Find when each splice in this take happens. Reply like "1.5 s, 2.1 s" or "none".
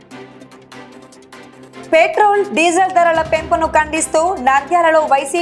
1.8 s